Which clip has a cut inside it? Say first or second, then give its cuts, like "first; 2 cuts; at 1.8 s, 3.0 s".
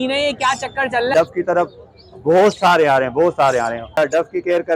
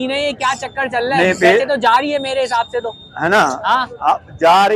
first; 2 cuts; at 1.1 s, 4.0 s